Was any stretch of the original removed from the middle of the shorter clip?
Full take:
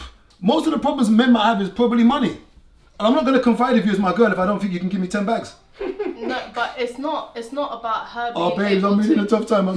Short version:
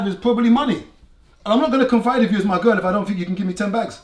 no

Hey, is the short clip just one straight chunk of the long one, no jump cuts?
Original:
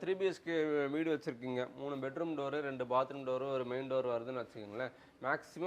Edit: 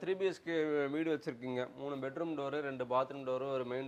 yes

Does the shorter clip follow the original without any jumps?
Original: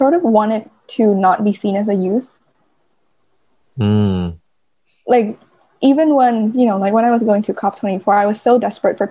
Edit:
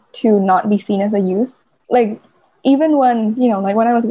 no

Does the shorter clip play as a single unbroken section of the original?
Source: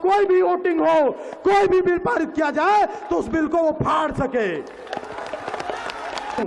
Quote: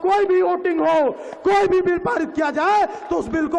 yes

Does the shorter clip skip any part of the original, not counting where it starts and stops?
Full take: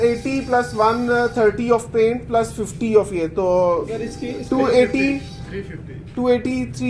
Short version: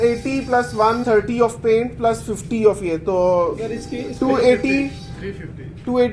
yes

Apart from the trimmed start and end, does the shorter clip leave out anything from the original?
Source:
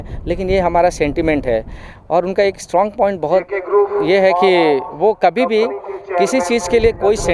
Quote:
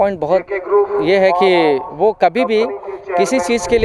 no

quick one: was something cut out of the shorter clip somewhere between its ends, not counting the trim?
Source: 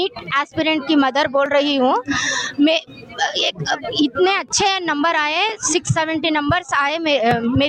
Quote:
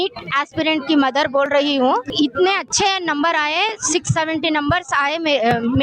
yes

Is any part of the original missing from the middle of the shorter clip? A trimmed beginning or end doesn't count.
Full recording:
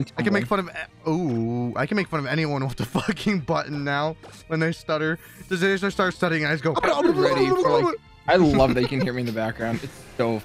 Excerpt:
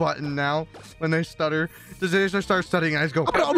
no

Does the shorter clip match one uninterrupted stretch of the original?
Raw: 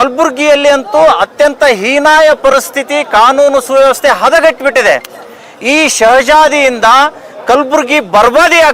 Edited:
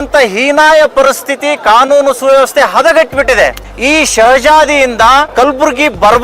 no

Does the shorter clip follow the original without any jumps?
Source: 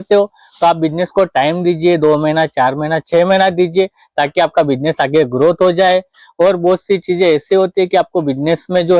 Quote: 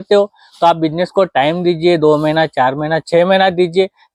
yes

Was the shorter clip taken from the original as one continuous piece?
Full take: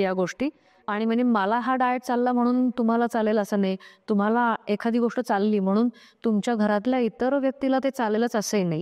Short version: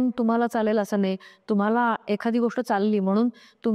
yes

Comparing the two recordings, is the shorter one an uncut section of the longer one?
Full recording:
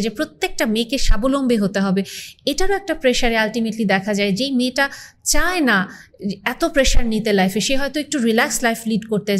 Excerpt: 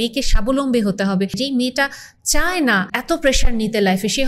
no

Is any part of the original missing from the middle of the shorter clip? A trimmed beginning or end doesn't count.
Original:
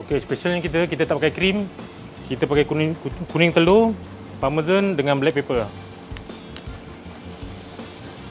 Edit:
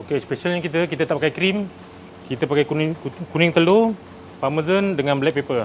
no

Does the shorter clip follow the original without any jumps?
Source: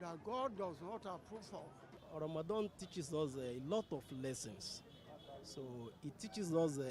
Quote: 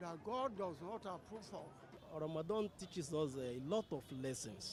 yes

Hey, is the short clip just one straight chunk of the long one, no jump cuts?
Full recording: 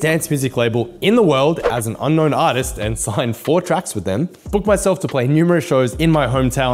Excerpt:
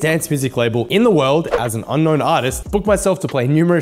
no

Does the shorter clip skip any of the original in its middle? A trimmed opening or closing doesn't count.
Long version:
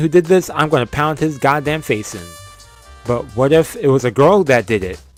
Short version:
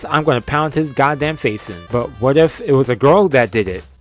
yes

